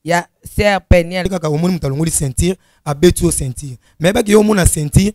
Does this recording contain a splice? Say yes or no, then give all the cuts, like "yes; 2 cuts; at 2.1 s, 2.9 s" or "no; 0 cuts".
yes; 1 cut; at 1.3 s